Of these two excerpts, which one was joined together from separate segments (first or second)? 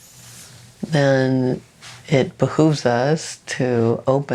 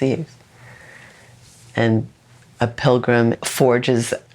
second